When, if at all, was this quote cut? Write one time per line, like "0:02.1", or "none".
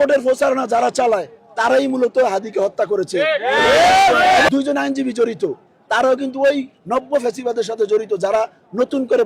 0:04.5